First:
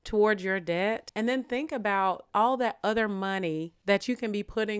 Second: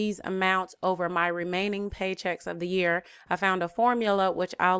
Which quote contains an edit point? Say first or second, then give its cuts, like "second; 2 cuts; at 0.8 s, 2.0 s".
first; 3 cuts; at 1.1 s, 2.2 s, 3.7 s